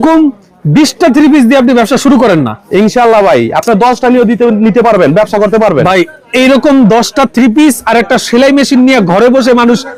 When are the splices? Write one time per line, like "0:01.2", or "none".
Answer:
none